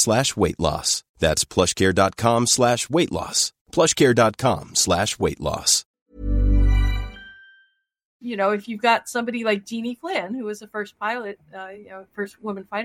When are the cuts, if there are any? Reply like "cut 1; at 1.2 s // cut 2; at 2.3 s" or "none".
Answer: cut 1; at 5.9 s // cut 2; at 8.2 s